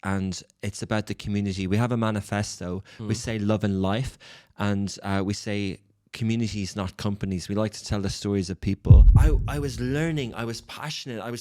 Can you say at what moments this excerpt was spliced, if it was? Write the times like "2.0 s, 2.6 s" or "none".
9.1 s